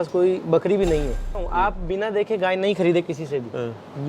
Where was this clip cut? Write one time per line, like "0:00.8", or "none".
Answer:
0:01.4